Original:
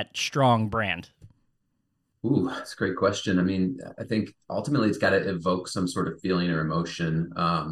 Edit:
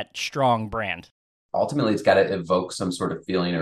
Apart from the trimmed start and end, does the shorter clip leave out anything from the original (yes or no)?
yes